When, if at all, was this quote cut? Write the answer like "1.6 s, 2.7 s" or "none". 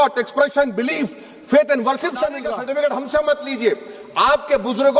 2.5 s